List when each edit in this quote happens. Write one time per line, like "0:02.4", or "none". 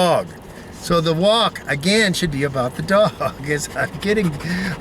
none